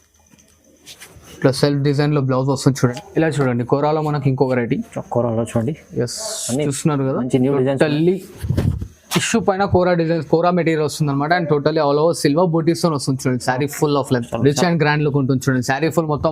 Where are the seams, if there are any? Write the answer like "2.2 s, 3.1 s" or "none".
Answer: 2.9 s, 14.3 s